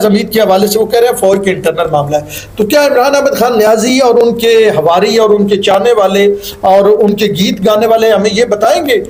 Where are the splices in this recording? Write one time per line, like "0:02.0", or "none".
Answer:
none